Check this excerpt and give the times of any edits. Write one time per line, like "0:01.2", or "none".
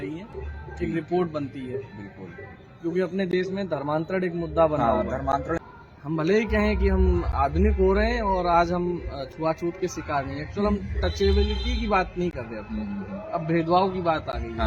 0:05.7